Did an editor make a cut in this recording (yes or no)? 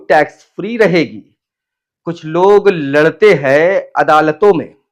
no